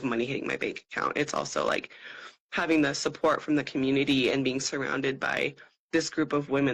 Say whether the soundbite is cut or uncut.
uncut